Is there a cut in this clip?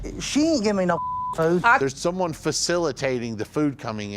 yes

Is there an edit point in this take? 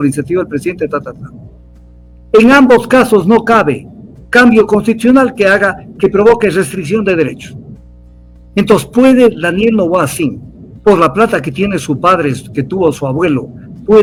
no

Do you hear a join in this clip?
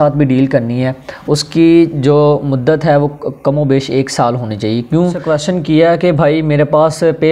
yes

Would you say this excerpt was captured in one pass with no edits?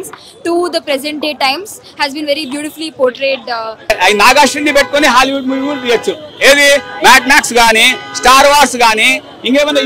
no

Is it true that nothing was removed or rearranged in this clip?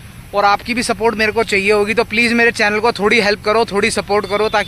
yes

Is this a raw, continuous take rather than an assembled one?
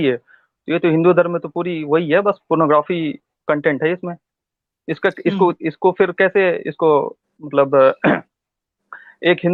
yes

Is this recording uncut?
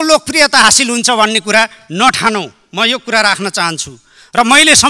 yes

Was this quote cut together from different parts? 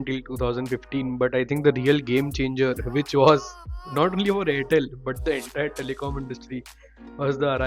no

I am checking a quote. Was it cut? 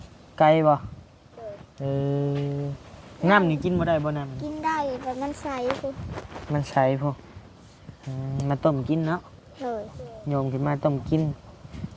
no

